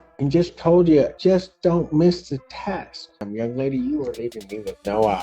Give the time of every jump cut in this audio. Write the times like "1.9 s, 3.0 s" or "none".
1.1 s, 3.3 s